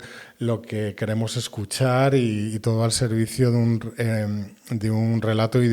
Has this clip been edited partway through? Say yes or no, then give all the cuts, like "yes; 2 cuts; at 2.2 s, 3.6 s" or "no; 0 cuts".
no; 0 cuts